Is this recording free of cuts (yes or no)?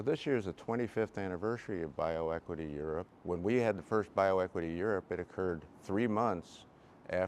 no